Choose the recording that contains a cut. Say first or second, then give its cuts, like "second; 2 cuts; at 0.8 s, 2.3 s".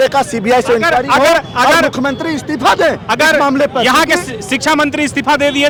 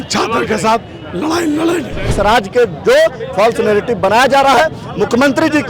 second; 1 cut; at 2.1 s